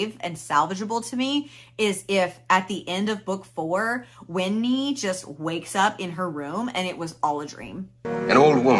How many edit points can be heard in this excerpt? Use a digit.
0